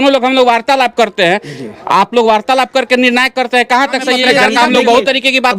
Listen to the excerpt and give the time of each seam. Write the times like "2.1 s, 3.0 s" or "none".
4.2 s